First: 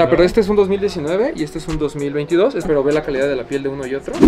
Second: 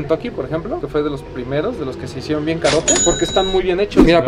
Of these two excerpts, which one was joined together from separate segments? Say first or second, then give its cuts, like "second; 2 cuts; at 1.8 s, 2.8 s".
first; 1 cut; at 2.6 s